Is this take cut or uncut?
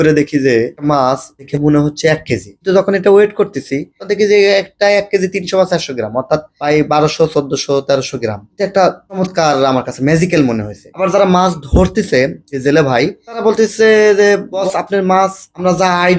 cut